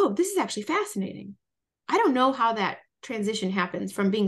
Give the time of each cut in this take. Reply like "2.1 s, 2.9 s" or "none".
none